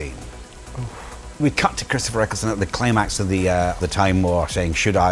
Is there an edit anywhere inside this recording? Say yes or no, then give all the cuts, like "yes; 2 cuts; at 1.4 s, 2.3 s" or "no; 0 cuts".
yes; 2 cuts; at 0.7 s, 3.8 s